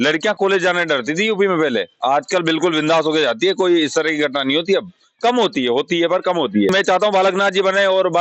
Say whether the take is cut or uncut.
cut